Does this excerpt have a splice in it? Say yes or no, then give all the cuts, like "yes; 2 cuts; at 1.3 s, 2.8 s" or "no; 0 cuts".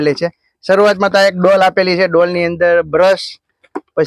no; 0 cuts